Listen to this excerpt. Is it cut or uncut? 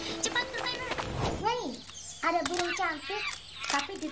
cut